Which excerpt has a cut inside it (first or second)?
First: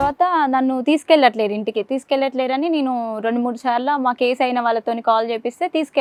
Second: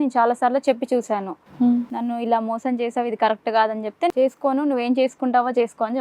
second